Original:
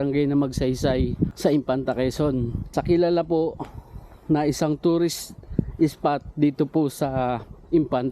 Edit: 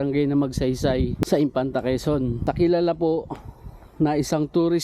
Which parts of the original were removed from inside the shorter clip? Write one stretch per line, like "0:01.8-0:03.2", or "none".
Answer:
0:01.2-0:01.3
0:02.5-0:02.7